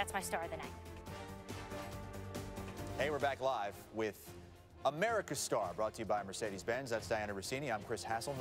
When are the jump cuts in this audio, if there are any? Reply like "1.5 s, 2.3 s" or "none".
2.9 s